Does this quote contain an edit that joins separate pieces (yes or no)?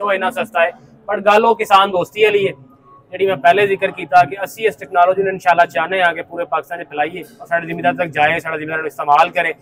no